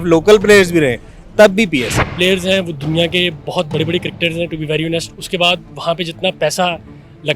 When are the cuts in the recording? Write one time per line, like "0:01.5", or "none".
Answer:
0:02.1